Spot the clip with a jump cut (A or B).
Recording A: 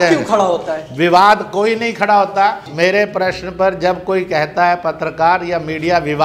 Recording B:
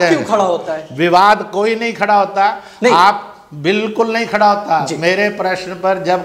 A